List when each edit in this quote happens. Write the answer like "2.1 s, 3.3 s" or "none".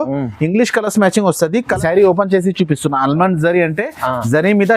1.8 s